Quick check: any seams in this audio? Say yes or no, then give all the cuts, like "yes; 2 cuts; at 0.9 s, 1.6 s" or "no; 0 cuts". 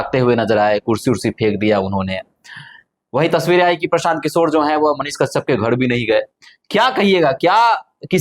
no; 0 cuts